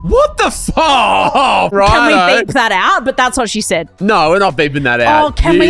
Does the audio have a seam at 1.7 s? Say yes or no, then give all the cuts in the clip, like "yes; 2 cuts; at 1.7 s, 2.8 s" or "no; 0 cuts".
yes; 2 cuts; at 1.7 s, 3.9 s